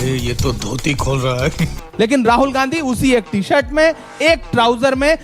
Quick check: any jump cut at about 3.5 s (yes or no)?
no